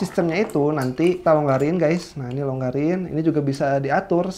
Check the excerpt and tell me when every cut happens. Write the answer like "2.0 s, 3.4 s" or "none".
1.2 s